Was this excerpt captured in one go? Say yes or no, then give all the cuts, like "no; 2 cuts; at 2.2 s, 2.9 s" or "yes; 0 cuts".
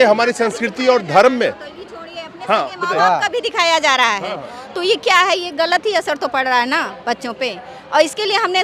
yes; 0 cuts